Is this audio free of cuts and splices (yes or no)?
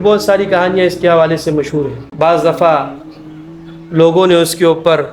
no